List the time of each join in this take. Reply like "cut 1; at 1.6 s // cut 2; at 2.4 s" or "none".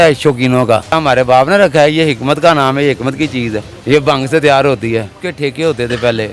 cut 1; at 1.0 s // cut 2; at 3.7 s // cut 3; at 5.2 s